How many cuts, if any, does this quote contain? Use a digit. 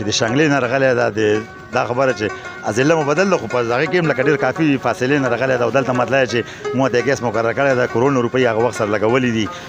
0